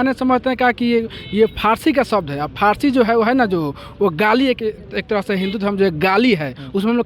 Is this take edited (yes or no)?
no